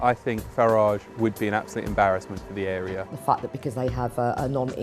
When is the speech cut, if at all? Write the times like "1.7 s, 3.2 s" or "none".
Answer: 3.1 s